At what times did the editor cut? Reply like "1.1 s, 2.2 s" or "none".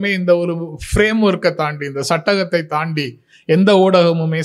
none

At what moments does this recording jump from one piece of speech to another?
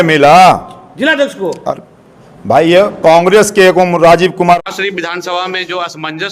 4.6 s

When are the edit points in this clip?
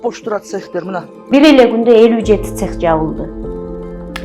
1.2 s

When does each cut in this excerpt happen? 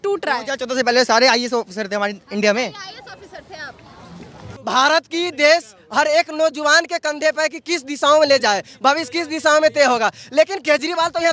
4.5 s

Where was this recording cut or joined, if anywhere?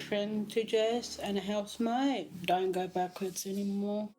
2.4 s

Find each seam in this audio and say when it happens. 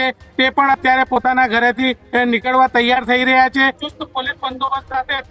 3.8 s

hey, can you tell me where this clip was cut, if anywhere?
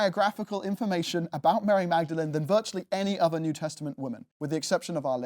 4.3 s

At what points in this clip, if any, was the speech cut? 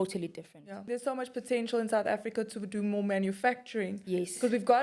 0.9 s

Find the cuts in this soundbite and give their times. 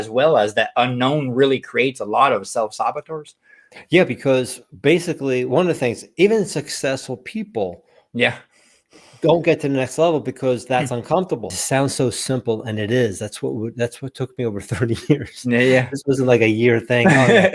11.6 s

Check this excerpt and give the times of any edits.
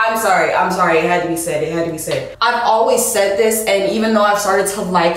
2.3 s

